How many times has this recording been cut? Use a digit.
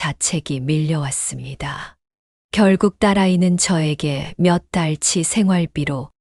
1